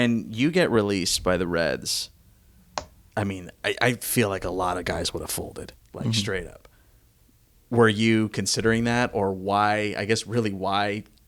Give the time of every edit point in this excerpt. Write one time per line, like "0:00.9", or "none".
none